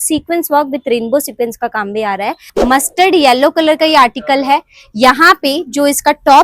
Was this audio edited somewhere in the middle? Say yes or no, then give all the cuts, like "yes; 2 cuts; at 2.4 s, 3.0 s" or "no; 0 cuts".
yes; 1 cut; at 2.5 s